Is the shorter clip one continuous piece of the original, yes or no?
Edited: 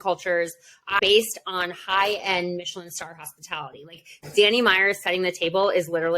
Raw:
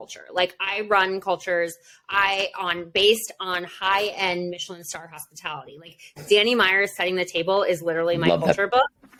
no